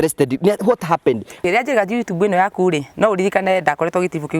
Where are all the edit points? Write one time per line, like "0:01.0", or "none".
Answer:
0:01.4